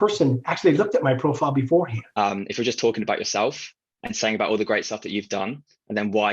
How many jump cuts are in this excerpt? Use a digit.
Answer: 1